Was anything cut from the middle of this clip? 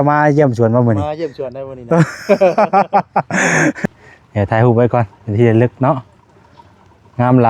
yes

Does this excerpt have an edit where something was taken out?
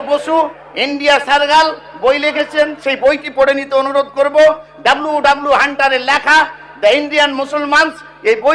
no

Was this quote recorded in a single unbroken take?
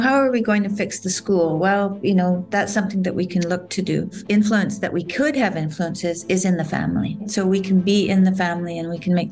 no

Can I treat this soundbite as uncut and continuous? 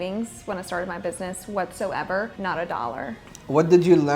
no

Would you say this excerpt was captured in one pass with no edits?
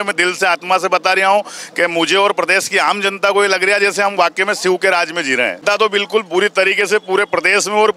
no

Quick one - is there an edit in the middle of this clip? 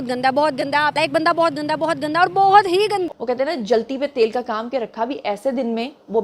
no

